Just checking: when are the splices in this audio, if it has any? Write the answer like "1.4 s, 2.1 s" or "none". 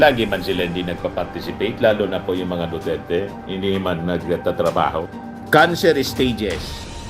5.1 s